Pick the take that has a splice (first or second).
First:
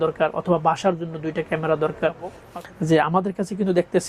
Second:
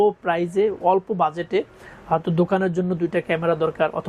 first